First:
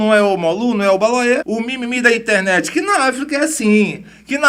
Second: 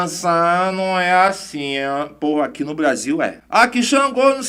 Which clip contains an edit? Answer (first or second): first